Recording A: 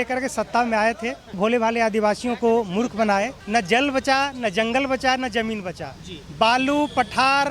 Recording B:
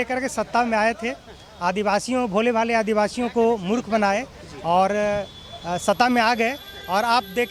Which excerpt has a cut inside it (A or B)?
A